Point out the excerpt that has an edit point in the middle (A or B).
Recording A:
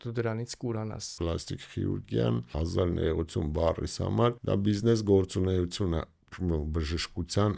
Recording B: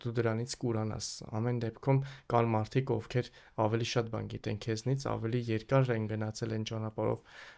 A